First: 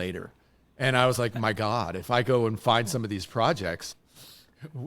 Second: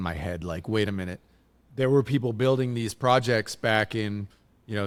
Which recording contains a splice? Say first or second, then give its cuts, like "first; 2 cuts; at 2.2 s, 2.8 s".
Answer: first; 1 cut; at 3.9 s